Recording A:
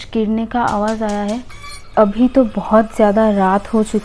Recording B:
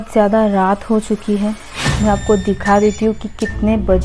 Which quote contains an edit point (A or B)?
A